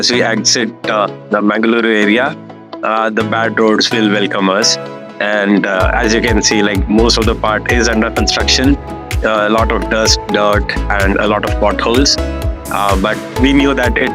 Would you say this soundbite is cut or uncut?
uncut